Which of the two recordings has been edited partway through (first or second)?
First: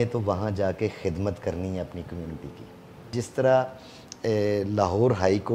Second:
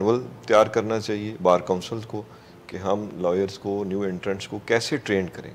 first